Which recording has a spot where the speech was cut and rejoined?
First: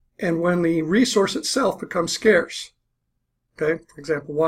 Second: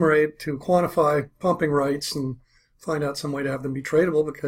second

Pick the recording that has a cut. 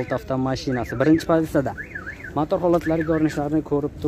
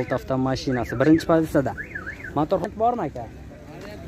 second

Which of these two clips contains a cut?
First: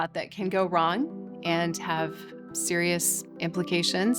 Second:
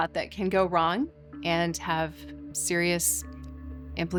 first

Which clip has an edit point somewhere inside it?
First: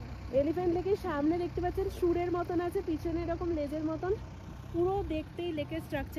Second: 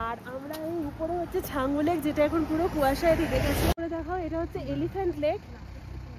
second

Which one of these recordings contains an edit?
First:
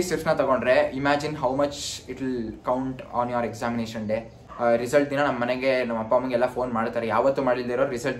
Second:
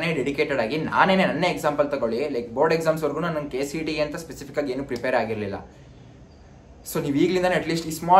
first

